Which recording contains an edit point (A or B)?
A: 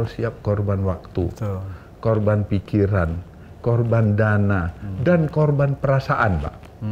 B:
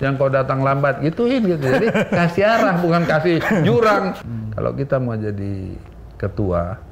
B